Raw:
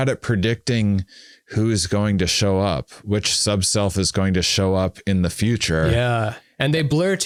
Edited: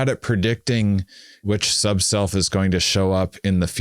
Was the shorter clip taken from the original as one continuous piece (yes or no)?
no